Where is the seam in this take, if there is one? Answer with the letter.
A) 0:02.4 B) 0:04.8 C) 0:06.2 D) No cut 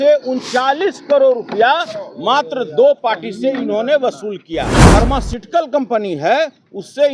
B